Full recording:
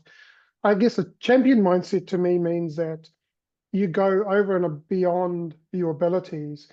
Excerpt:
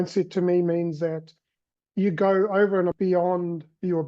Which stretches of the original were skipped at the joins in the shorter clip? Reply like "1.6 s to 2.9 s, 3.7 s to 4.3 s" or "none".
4.7 s to 4.9 s